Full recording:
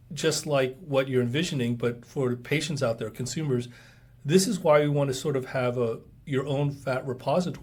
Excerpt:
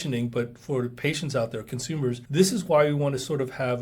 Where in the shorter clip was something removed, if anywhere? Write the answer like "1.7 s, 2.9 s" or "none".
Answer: 2.2 s

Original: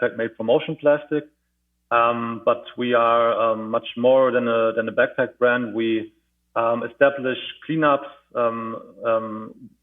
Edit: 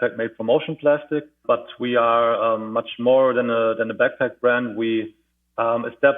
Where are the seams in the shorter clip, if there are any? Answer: 1.3 s

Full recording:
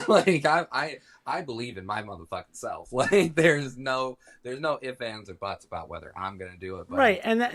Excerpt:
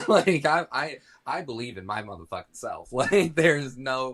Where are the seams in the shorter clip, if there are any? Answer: none

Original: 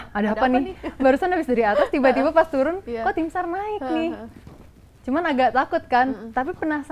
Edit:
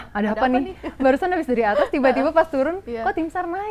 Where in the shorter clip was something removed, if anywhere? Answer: none

